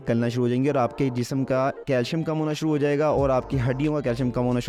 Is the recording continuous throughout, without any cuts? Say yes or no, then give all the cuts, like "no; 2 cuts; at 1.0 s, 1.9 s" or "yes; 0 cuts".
yes; 0 cuts